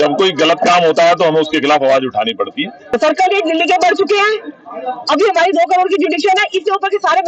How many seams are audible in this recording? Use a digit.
1